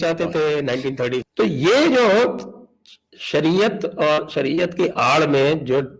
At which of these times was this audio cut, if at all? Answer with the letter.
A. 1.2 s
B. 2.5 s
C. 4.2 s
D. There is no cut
A